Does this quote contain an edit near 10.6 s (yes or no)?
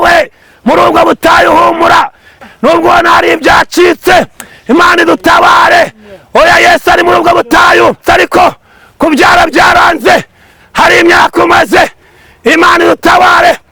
no